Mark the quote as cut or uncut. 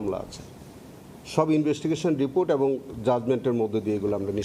uncut